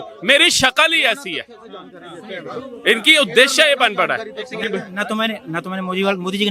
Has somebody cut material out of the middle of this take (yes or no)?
no